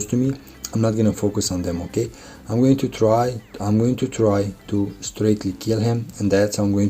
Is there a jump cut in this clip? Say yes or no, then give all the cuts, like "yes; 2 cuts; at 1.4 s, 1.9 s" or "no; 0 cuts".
no; 0 cuts